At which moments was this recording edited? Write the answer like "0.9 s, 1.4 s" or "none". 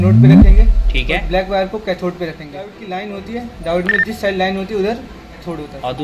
2.8 s